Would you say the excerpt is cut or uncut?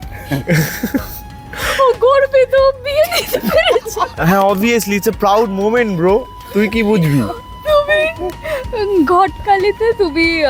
uncut